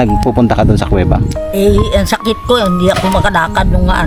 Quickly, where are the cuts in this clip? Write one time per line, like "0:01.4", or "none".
none